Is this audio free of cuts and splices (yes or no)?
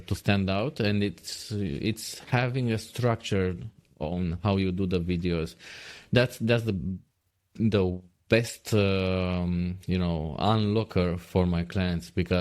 yes